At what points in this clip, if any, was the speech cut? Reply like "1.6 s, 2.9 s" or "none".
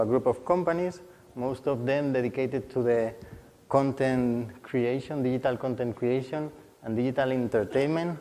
2.8 s